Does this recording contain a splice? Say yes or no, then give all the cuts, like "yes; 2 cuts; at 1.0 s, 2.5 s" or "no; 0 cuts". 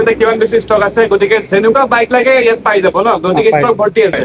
no; 0 cuts